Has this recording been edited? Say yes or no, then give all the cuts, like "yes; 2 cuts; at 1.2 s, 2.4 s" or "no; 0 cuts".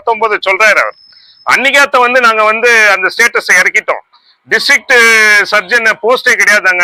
no; 0 cuts